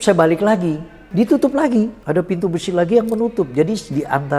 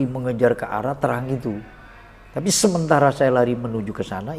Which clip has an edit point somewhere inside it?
first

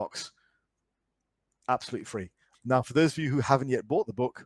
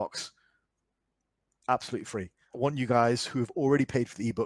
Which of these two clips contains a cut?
first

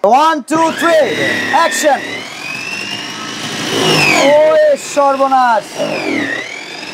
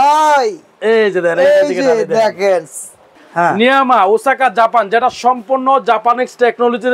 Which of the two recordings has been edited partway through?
second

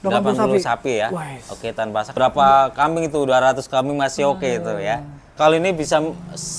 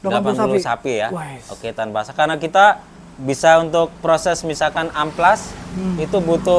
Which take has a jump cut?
first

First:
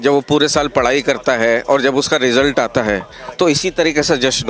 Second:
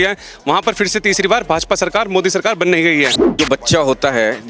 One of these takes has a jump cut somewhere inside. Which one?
second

